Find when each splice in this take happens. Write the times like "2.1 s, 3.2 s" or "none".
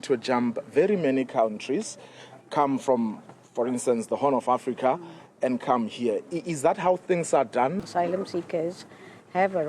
7.8 s